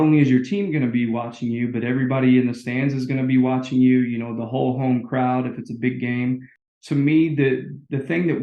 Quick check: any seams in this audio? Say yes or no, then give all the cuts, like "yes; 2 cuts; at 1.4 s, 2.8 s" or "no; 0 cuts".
yes; 1 cut; at 6.5 s